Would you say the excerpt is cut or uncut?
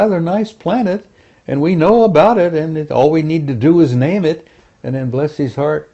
uncut